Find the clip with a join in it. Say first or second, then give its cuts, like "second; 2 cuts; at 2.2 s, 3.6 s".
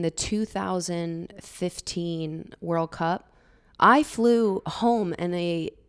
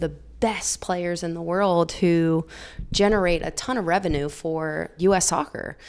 second; 1 cut; at 4.9 s